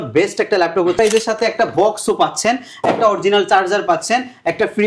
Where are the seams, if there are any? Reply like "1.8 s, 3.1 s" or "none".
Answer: 1.0 s